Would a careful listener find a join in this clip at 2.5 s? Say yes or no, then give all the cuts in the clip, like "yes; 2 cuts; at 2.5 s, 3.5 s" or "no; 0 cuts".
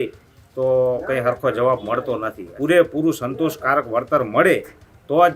yes; 1 cut; at 2.5 s